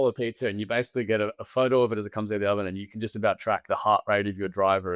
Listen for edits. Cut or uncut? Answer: uncut